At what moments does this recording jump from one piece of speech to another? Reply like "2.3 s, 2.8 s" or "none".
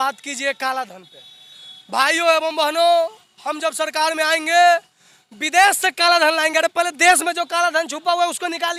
none